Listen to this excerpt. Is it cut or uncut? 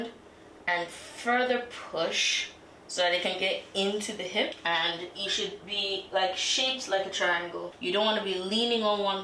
cut